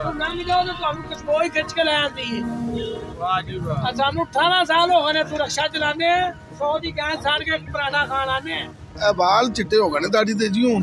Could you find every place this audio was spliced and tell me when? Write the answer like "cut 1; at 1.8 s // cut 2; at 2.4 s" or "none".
cut 1; at 8.9 s